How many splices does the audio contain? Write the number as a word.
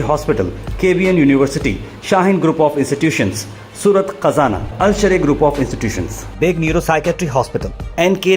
zero